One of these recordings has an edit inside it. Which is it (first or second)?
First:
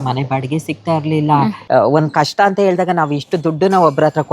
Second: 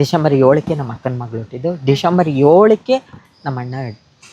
first